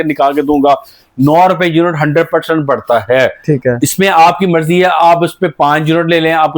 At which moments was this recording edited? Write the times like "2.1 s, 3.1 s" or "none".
none